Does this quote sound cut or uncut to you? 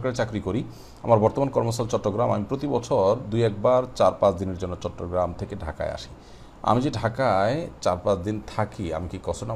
uncut